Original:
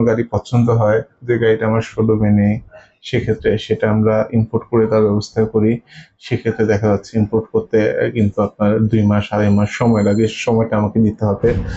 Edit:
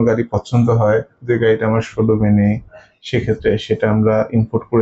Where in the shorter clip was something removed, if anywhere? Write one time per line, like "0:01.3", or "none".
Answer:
none